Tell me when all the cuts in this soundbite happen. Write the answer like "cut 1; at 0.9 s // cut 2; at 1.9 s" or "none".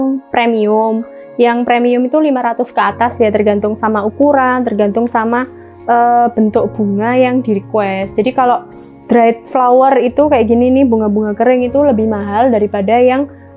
none